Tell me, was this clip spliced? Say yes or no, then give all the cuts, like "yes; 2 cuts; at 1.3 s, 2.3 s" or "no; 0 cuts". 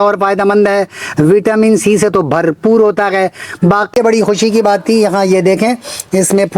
yes; 1 cut; at 3.9 s